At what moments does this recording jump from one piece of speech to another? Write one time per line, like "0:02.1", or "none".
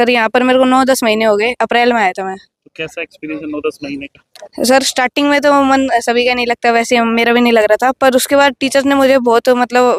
none